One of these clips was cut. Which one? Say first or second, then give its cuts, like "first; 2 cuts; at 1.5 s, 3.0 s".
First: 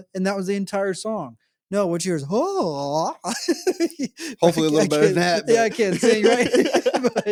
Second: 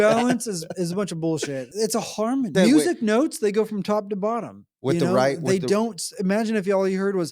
second; 2 cuts; at 1.7 s, 2.5 s